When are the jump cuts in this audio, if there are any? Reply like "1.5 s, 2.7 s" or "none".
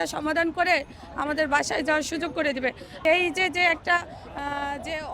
3.0 s